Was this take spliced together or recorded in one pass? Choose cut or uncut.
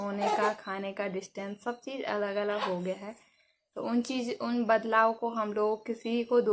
uncut